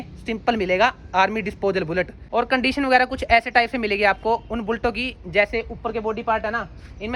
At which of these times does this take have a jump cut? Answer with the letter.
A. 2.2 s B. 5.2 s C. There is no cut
A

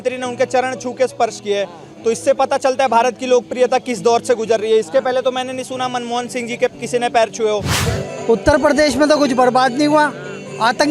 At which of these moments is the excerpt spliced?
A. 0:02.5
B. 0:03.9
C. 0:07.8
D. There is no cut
C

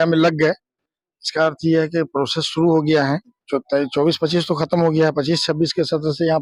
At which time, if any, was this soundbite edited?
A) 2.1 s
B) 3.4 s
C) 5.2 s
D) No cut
B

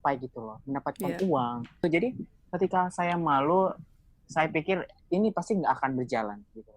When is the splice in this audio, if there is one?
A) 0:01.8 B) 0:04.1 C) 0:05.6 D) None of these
A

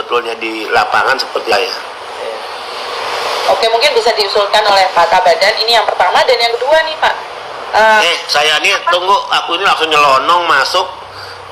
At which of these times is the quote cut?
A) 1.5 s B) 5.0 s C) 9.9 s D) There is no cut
A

